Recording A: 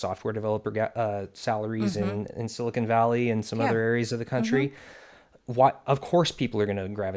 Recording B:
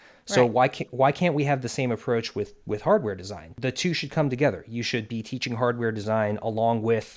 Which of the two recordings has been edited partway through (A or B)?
B